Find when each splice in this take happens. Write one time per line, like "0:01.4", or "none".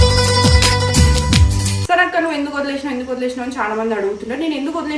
0:01.7

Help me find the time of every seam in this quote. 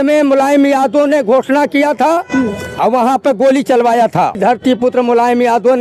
0:04.4

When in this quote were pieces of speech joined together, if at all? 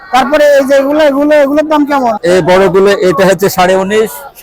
0:02.1

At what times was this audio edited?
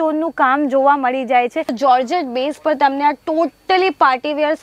0:01.7

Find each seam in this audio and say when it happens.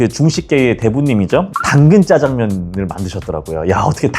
0:01.5

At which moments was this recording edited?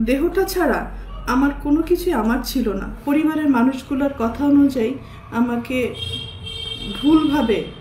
0:02.9

